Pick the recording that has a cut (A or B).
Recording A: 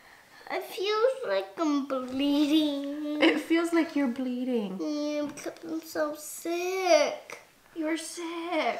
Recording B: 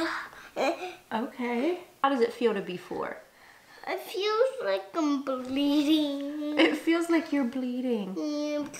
B